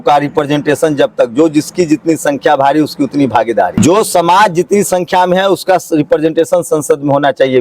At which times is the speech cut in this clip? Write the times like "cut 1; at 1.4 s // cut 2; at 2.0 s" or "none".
cut 1; at 3.7 s